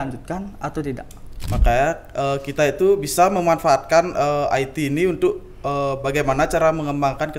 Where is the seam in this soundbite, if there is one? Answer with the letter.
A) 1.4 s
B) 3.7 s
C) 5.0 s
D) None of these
A